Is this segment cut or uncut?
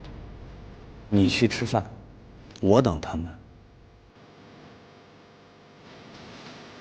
cut